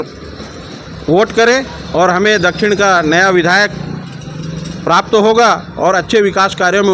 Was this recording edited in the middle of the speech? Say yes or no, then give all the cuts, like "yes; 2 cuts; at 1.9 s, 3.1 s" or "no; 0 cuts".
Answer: no; 0 cuts